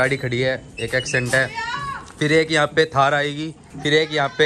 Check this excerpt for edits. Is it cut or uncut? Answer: uncut